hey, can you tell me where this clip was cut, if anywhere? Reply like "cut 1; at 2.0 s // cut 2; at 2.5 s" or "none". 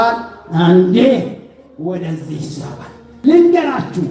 cut 1; at 3.0 s